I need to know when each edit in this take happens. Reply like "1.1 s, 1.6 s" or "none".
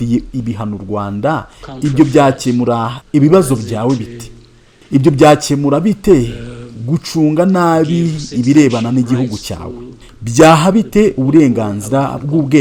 none